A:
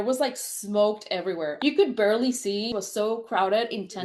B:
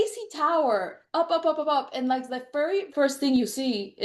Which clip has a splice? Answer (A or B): B